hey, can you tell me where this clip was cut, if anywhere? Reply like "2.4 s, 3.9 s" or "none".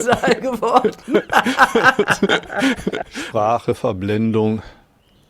3.1 s